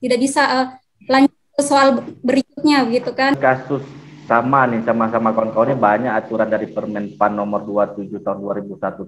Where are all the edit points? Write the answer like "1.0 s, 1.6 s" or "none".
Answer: 3.4 s